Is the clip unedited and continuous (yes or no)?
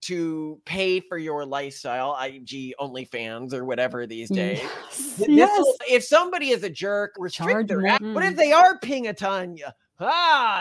no